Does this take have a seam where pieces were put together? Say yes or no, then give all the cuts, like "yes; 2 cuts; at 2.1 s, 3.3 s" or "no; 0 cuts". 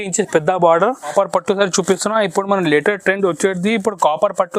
yes; 1 cut; at 1.1 s